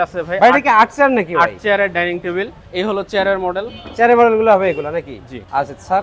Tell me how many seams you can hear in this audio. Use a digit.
0